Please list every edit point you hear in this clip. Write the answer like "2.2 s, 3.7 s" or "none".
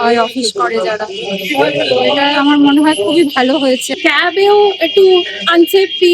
4.0 s